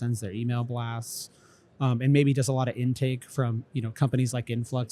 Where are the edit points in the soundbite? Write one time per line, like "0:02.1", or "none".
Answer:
none